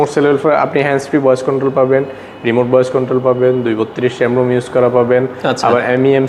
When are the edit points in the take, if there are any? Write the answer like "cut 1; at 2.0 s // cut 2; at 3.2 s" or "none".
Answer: none

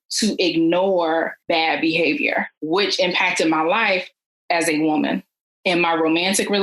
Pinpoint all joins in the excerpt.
cut 1; at 1.4 s // cut 2; at 2.6 s

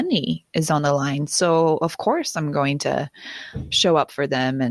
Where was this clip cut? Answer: none

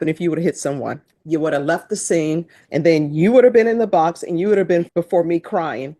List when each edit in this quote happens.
cut 1; at 1.1 s // cut 2; at 2.6 s // cut 3; at 4.9 s

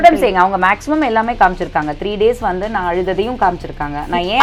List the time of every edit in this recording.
none

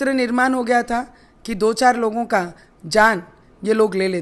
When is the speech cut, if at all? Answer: none

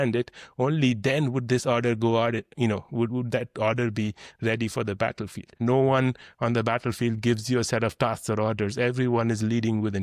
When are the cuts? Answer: cut 1; at 5.5 s

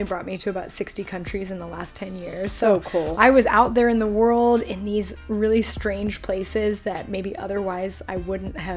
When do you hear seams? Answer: none

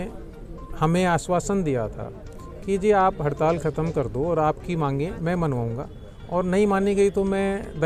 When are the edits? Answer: none

